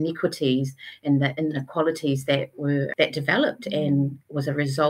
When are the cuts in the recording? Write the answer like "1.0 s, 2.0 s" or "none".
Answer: 2.9 s